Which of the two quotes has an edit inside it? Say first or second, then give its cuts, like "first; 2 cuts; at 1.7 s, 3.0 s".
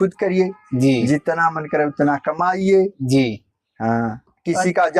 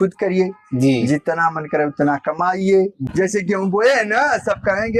second; 1 cut; at 3.0 s